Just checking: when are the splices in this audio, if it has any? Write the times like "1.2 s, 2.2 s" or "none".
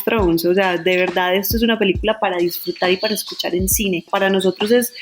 4.1 s